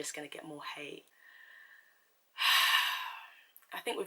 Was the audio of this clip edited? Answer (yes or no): yes